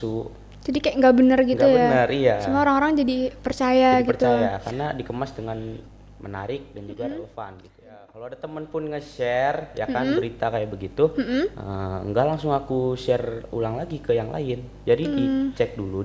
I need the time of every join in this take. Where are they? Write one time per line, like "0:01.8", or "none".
0:08.1